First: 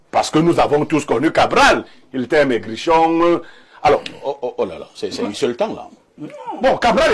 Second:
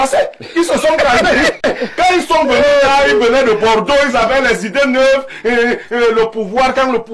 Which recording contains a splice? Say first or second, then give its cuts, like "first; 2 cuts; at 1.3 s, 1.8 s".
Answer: second; 1 cut; at 1.6 s